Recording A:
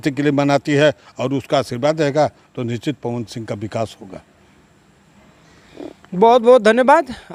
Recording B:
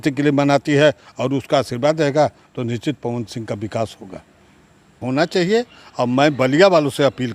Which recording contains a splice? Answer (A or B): B